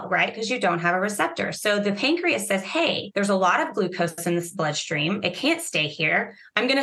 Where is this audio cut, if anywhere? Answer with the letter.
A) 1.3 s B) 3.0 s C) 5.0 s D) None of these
B